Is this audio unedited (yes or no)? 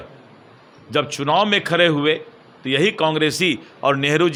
yes